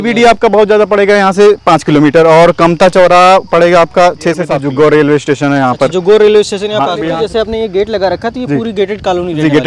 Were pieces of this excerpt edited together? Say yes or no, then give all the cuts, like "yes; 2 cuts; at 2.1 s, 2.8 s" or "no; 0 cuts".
yes; 2 cuts; at 4.5 s, 7.0 s